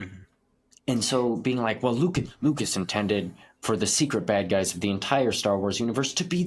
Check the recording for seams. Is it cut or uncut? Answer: uncut